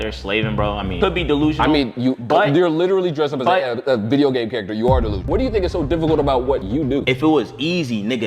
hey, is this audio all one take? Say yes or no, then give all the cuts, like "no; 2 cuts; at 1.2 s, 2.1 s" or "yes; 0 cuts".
yes; 0 cuts